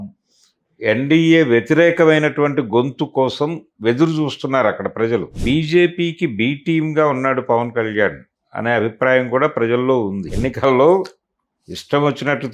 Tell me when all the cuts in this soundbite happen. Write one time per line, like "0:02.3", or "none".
0:05.3
0:10.2